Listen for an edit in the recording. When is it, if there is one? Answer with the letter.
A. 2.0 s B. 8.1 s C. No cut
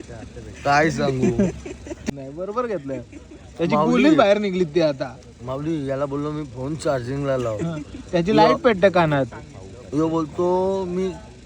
A